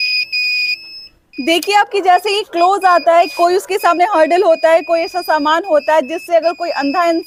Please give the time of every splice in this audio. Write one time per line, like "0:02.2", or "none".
none